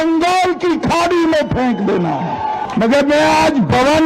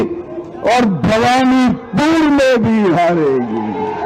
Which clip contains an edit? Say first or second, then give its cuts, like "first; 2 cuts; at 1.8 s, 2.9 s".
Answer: first; 1 cut; at 2.6 s